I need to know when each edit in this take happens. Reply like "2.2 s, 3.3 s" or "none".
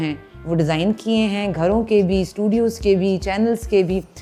none